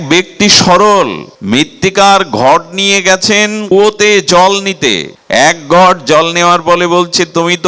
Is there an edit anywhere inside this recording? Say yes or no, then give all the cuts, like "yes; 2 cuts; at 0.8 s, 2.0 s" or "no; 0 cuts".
yes; 3 cuts; at 1.3 s, 3.6 s, 5.1 s